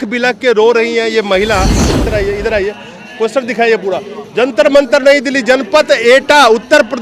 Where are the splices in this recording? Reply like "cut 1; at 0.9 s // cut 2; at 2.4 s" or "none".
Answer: cut 1; at 2.0 s